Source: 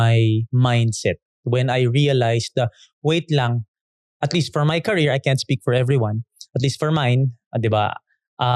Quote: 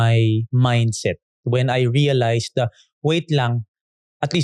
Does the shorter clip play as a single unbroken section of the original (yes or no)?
yes